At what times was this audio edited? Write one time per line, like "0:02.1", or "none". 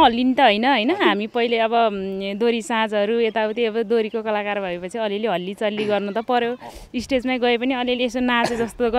none